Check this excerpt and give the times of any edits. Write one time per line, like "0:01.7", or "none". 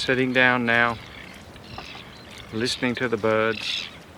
none

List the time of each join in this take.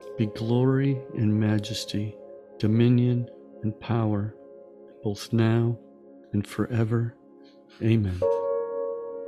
0:08.1

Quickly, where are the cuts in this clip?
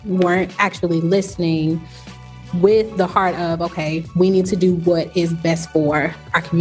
none

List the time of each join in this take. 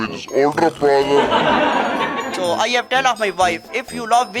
0:02.3

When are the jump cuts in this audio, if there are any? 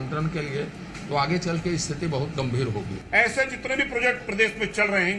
0:03.0

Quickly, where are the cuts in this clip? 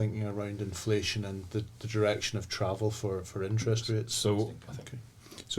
0:04.6

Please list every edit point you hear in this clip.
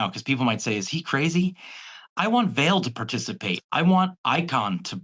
0:03.5

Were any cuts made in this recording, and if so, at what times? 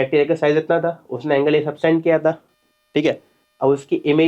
none

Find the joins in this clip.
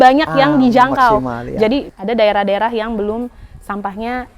0:01.9

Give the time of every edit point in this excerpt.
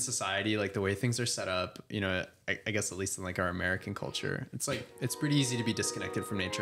none

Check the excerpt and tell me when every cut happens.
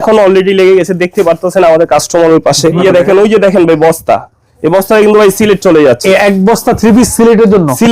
0:02.8
0:06.0

